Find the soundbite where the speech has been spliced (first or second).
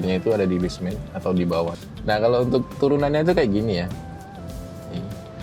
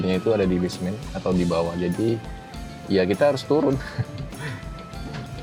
first